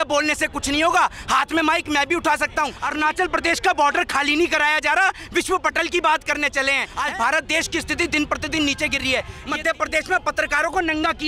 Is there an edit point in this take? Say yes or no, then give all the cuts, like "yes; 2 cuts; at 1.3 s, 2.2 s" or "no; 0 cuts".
yes; 3 cuts; at 2.8 s, 6.9 s, 9.4 s